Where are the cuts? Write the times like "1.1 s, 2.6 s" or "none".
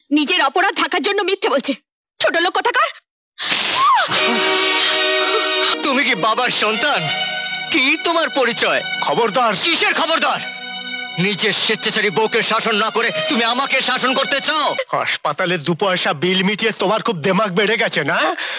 5.7 s, 14.8 s